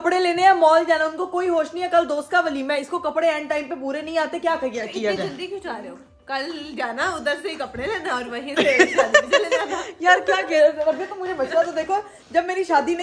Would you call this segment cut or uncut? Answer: uncut